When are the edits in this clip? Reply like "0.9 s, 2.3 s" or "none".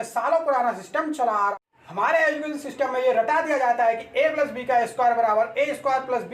1.5 s